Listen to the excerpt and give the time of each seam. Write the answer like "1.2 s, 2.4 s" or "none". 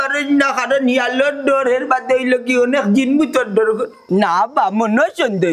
4.1 s